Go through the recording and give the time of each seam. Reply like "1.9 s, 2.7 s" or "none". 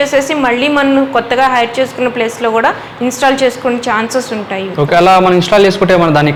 none